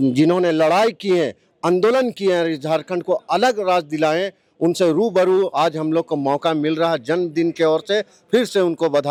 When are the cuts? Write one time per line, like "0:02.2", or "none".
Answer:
none

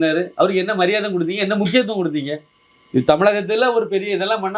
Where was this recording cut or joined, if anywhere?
none

